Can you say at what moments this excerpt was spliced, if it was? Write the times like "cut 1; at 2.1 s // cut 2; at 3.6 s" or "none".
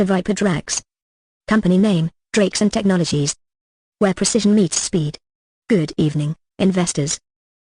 cut 1; at 6.7 s